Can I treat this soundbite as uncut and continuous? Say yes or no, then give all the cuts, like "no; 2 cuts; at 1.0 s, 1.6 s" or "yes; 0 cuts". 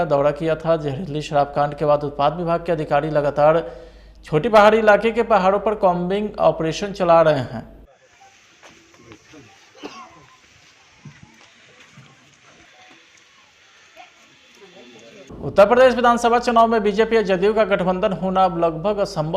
no; 1 cut; at 15.5 s